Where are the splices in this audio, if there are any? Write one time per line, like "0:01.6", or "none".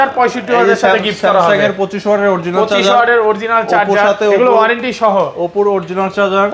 none